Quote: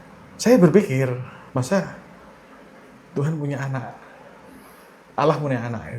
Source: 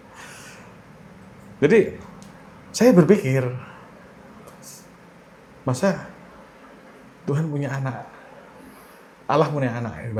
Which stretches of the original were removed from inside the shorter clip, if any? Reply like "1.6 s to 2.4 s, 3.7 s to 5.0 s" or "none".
3.7 s to 5.5 s